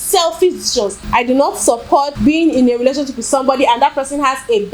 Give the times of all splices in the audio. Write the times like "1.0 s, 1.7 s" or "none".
1.0 s, 2.1 s